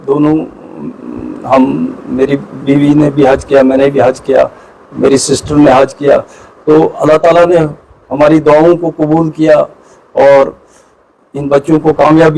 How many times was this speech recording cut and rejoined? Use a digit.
0